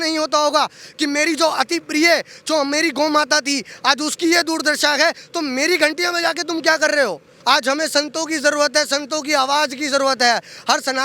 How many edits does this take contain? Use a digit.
1